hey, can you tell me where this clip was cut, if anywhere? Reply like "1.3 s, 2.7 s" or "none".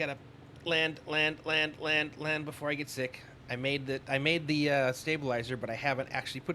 none